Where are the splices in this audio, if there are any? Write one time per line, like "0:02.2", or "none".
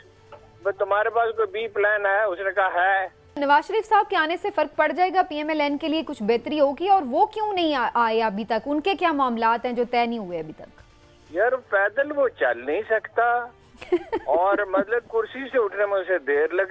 0:03.4